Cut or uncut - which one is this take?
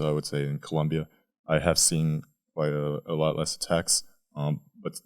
uncut